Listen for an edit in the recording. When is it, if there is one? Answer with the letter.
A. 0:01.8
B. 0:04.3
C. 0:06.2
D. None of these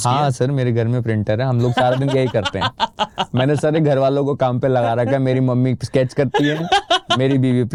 D